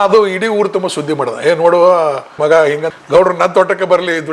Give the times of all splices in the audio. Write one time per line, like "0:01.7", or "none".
none